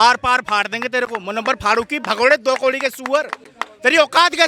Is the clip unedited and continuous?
yes; 0 cuts

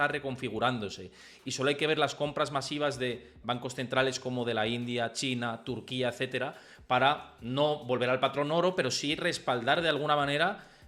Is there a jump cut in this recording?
no; 0 cuts

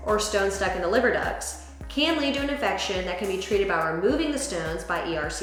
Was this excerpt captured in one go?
yes; 0 cuts

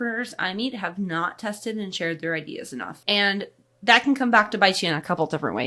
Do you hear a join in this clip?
yes; 1 cut; at 2.9 s

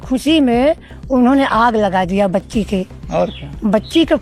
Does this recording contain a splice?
no; 0 cuts

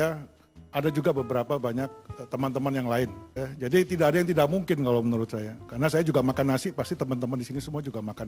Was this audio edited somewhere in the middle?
yes; 1 cut; at 3.3 s

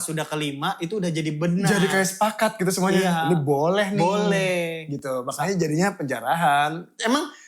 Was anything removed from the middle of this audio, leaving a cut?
no; 0 cuts

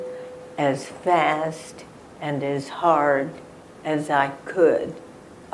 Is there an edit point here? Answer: no; 0 cuts

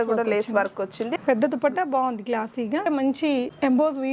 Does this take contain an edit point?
yes; 1 cut; at 2.9 s

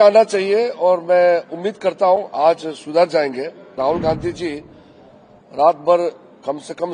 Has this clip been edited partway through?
yes; 1 cut; at 3.6 s

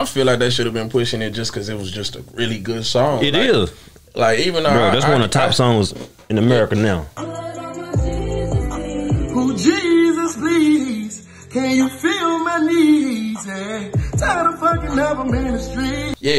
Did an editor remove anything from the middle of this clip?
no; 0 cuts

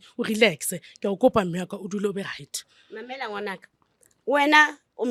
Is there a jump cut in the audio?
no; 0 cuts

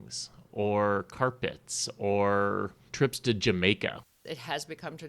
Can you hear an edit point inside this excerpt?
yes; 2 cuts; at 2.8 s, 4.0 s

